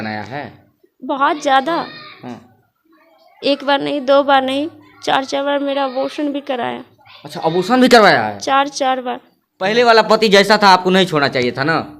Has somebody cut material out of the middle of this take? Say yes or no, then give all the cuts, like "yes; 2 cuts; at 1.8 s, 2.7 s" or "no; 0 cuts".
yes; 1 cut; at 9.7 s